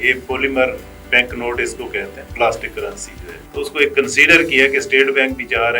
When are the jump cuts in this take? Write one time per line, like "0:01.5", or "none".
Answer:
0:03.4

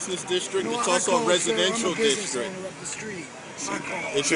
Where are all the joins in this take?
0:01.1

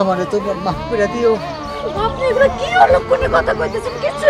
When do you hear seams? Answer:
none

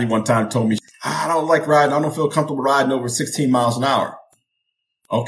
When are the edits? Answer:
0:00.9

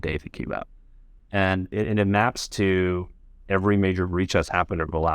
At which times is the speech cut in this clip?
0:01.7

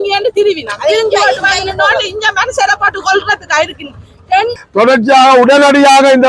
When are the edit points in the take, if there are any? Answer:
0:04.6

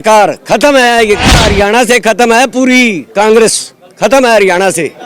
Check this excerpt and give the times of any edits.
0:01.5

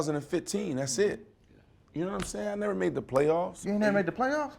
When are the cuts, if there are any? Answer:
0:03.6

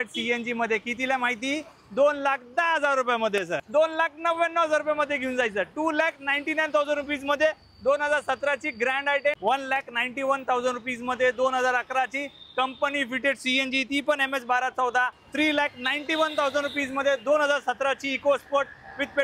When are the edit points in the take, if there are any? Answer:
0:03.6
0:09.4
0:15.2

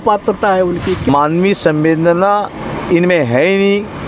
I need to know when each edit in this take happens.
0:01.1

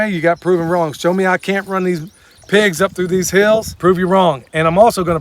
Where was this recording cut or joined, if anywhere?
0:03.7

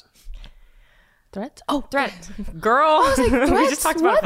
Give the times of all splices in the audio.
none

